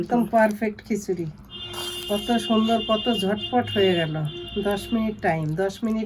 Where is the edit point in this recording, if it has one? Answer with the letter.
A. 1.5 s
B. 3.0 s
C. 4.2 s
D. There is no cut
D